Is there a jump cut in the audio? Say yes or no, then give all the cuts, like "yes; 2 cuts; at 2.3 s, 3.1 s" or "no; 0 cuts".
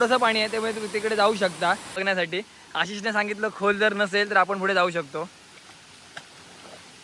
yes; 1 cut; at 2.0 s